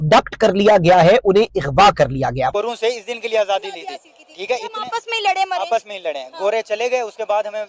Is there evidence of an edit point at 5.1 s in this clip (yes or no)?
no